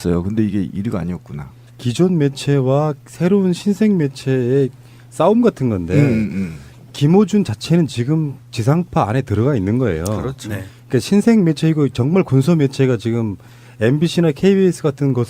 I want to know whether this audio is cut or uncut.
uncut